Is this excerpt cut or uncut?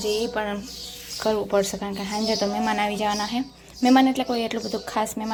uncut